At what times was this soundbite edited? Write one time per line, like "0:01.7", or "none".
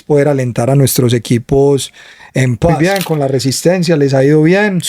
0:02.8